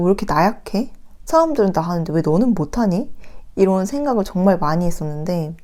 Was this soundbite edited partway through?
no; 0 cuts

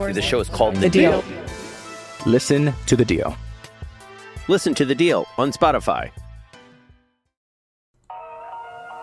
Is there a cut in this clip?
yes; 1 cut; at 7.9 s

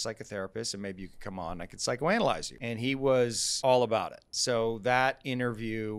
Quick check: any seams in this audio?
yes; 3 cuts; at 2.6 s, 3.5 s, 4.3 s

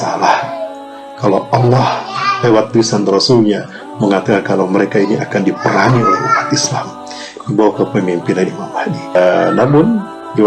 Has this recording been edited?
yes; 1 cut; at 9.1 s

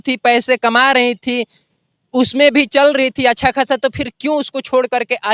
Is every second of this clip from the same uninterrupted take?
yes; 0 cuts

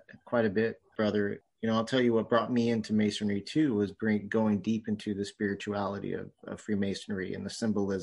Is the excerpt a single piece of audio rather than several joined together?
no; 1 cut; at 1.4 s

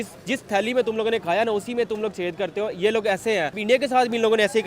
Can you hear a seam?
yes; 1 cut; at 3.6 s

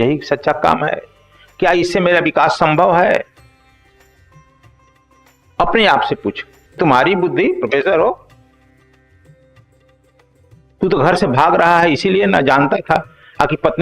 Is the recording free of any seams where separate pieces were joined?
no; 5 cuts; at 3.3 s, 5.2 s, 6.8 s, 8.2 s, 10.7 s

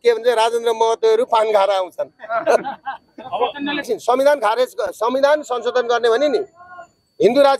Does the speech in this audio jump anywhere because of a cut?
yes; 1 cut; at 3.9 s

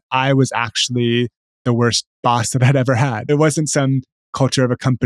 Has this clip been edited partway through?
yes; 2 cuts; at 2.1 s, 3.2 s

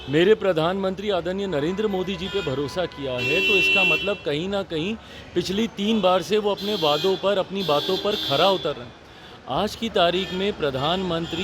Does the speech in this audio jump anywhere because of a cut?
no; 0 cuts

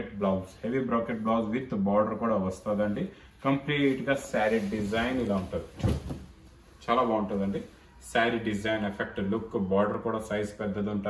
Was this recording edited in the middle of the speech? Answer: no; 0 cuts

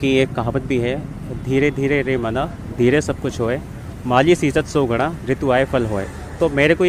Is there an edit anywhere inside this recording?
no; 0 cuts

